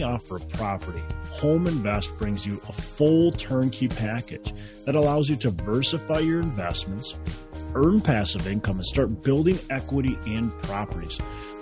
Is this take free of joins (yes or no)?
yes